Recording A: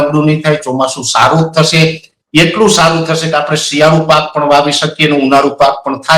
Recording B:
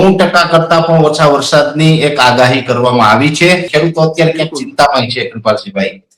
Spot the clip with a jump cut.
B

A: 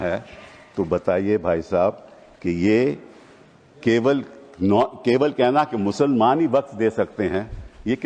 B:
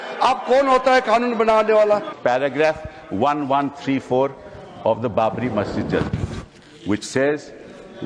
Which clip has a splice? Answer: B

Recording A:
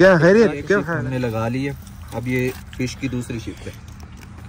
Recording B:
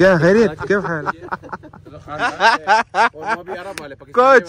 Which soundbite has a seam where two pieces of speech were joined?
A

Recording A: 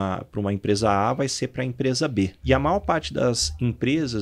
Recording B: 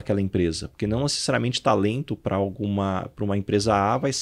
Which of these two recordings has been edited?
A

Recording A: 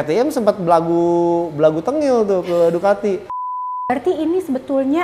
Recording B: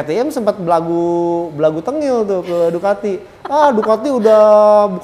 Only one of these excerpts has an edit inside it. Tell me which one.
A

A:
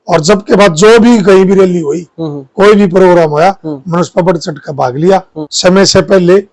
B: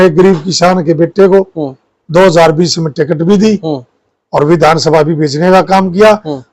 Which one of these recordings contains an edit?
A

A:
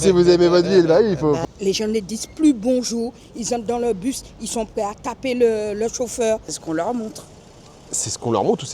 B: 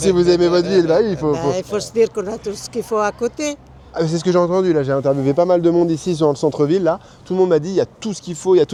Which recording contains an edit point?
A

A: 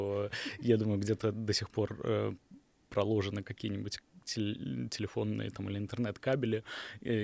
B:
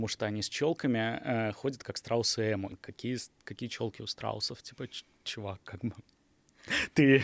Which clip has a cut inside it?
B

